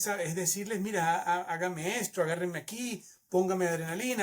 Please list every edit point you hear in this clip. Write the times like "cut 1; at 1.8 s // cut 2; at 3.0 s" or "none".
none